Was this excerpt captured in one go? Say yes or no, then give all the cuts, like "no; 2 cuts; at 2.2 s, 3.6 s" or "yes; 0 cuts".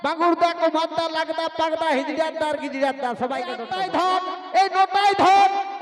no; 1 cut; at 3.6 s